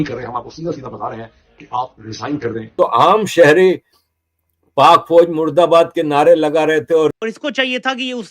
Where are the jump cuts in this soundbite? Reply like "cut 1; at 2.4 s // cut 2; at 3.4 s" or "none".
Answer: cut 1; at 2.7 s // cut 2; at 7.1 s